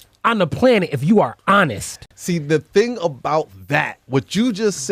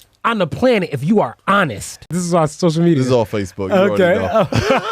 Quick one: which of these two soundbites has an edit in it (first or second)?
second